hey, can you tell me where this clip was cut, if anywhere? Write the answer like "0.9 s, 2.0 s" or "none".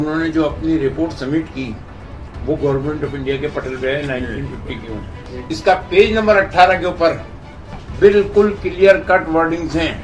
5.3 s